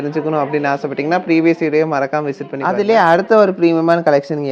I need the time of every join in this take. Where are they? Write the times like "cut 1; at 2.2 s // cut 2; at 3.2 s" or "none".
cut 1; at 2.7 s